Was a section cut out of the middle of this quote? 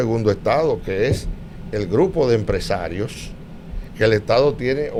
no; 0 cuts

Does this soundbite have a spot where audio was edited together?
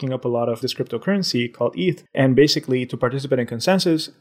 yes; 1 cut; at 2.0 s

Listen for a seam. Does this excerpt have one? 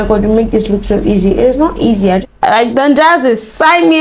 yes; 1 cut; at 2.2 s

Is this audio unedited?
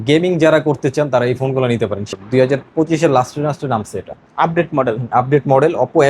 no; 1 cut; at 2.1 s

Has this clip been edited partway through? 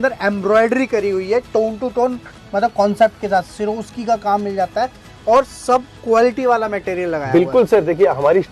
no; 0 cuts

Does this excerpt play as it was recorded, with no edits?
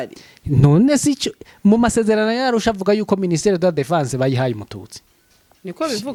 yes; 0 cuts

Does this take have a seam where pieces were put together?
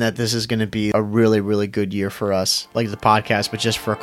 yes; 2 cuts; at 0.9 s, 2.6 s

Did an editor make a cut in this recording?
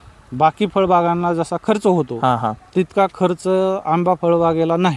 no; 0 cuts

